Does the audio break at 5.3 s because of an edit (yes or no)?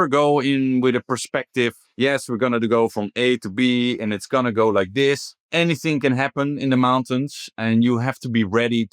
yes